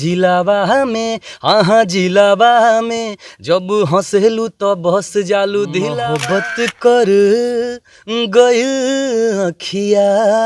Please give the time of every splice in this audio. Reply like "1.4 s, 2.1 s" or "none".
6.0 s